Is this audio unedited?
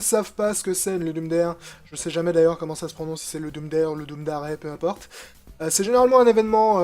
no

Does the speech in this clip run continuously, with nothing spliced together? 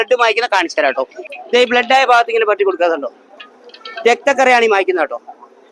no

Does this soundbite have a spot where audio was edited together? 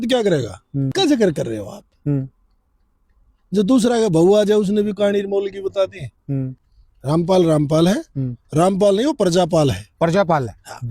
yes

